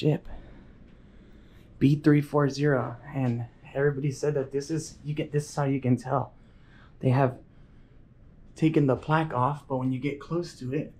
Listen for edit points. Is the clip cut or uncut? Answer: uncut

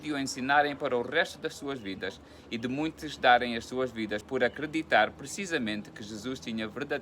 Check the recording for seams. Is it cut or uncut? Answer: cut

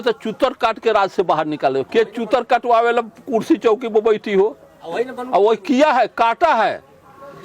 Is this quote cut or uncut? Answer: uncut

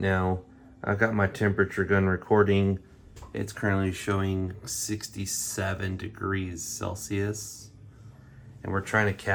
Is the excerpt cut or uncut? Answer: uncut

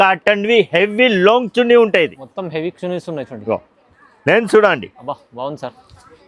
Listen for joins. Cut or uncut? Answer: uncut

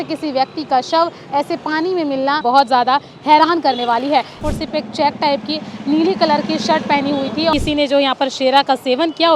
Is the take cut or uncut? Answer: cut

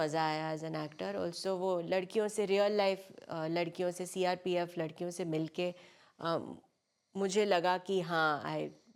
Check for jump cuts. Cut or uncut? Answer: uncut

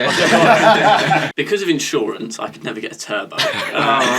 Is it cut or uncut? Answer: cut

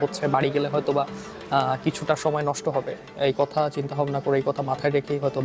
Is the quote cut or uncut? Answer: uncut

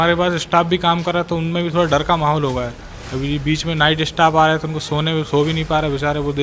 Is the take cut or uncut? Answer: uncut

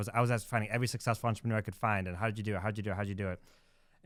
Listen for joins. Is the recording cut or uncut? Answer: uncut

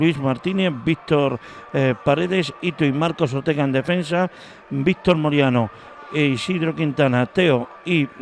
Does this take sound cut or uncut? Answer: cut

